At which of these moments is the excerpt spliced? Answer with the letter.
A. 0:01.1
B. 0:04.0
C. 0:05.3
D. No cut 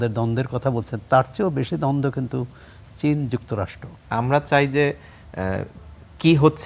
B